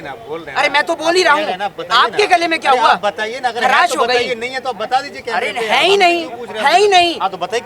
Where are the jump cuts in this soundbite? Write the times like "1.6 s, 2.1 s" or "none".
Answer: none